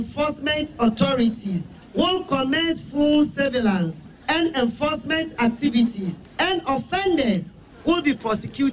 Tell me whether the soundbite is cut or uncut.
cut